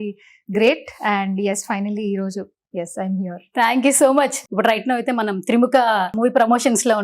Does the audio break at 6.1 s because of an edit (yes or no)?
yes